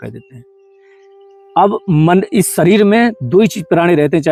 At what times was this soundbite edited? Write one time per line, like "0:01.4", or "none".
none